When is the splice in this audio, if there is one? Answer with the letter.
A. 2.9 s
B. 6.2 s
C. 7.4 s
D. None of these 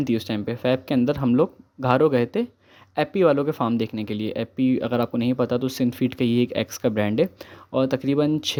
D